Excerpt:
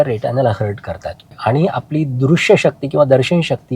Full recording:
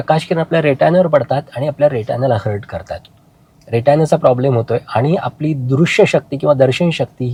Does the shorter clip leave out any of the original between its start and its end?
yes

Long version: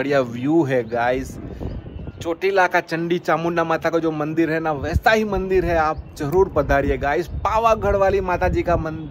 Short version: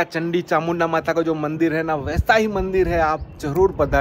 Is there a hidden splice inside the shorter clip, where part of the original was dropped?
no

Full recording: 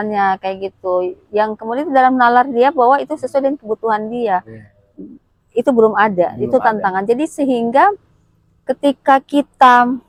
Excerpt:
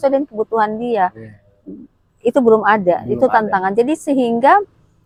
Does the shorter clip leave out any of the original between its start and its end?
no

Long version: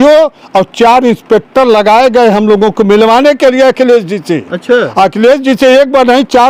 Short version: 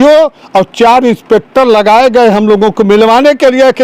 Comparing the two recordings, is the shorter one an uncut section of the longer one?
yes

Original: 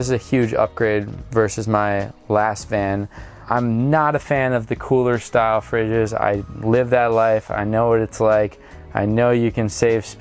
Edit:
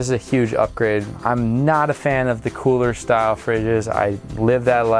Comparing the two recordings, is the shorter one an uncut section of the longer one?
no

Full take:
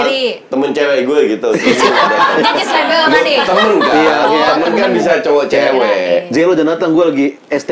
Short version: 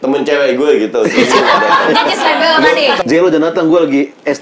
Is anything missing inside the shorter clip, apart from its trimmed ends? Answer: yes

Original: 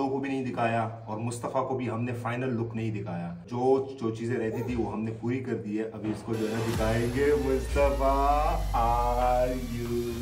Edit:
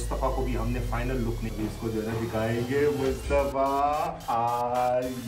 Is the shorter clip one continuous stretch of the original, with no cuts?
no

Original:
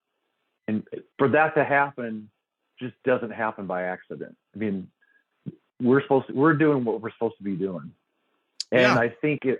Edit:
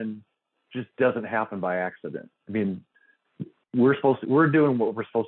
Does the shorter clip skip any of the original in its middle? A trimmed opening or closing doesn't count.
no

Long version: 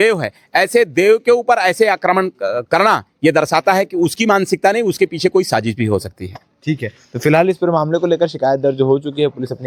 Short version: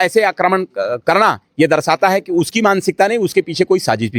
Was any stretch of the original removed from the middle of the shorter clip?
no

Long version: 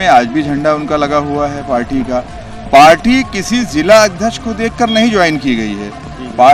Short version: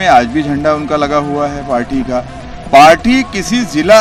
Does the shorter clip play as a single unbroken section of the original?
yes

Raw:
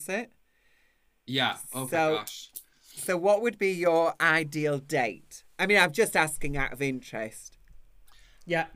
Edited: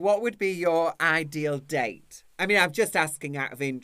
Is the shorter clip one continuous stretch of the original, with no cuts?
yes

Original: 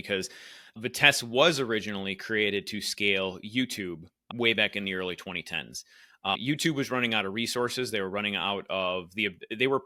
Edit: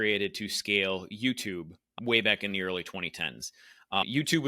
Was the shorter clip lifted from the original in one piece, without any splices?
yes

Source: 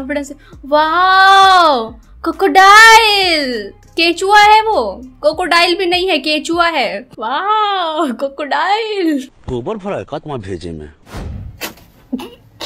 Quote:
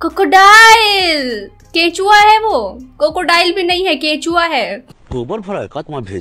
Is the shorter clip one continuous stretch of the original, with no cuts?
no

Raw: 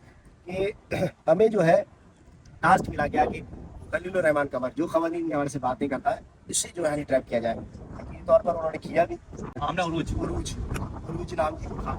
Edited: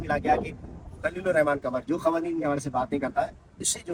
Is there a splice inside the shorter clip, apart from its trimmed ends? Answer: no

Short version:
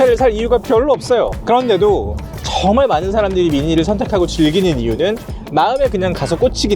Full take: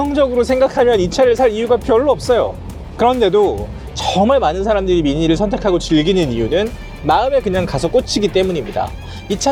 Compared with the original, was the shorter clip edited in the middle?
yes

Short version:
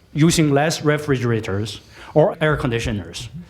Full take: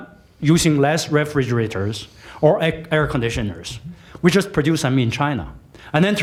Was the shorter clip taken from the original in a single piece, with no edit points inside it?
no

